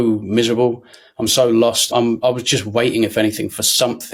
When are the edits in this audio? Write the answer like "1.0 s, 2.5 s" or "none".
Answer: none